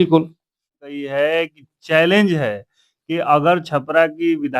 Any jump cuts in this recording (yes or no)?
yes